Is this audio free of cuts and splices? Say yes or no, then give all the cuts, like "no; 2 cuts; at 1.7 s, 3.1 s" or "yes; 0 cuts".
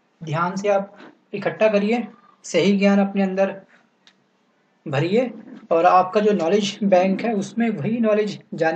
no; 1 cut; at 4.6 s